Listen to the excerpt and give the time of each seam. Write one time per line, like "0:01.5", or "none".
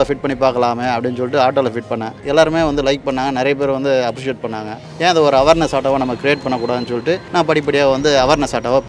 0:02.2
0:04.8
0:07.2